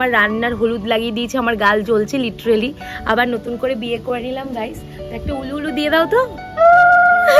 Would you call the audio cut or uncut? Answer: uncut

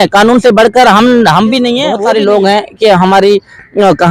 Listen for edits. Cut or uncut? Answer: cut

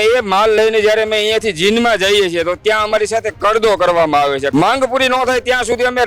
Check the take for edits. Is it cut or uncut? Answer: cut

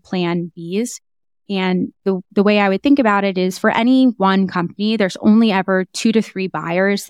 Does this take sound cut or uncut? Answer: uncut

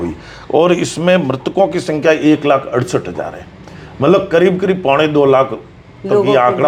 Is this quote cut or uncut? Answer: uncut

